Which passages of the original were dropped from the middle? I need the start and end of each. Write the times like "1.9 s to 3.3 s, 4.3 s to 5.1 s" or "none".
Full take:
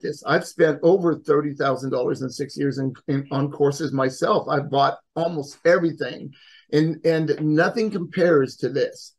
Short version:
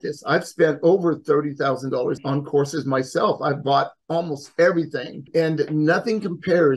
2.2 s to 3.3 s, 6.3 s to 7.0 s